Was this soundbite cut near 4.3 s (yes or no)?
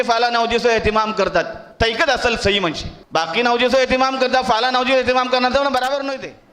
no